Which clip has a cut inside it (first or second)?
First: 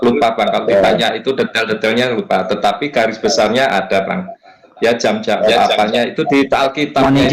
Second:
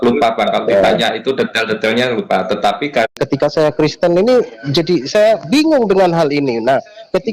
second